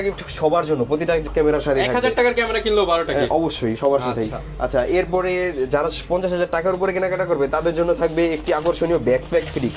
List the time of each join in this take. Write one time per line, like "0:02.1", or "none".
none